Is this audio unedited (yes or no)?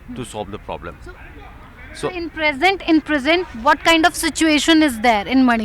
yes